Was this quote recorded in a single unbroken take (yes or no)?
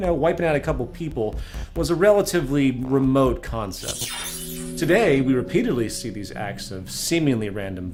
yes